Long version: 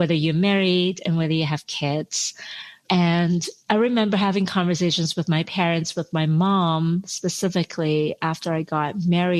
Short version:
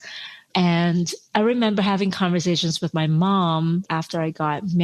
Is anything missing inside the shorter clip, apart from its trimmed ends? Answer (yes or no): yes